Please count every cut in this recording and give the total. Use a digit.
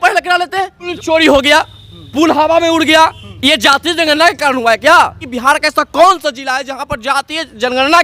3